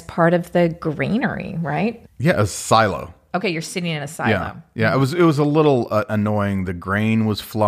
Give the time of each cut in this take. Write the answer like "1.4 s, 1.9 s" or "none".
2.1 s